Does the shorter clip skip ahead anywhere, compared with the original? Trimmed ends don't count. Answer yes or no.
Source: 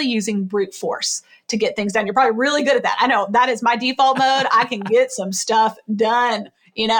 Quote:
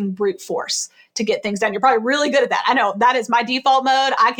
no